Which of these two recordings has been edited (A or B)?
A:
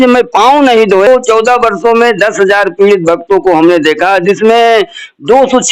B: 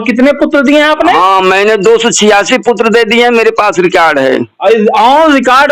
A